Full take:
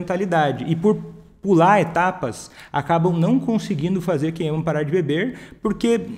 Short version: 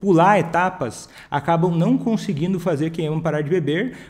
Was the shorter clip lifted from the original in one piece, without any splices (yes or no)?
yes